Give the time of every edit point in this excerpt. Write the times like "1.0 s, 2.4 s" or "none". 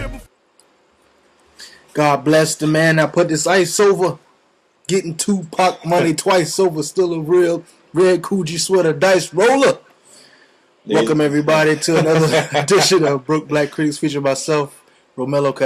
none